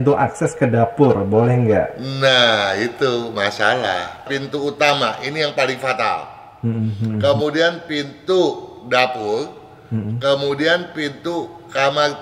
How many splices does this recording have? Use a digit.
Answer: 1